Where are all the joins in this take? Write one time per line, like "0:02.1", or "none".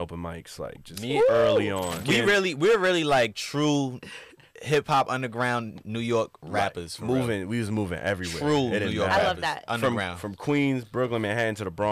0:02.0